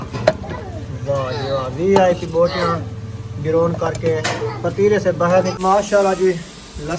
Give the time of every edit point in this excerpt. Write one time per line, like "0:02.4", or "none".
0:05.5